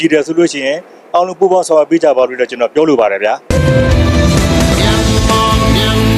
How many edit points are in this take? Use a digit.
1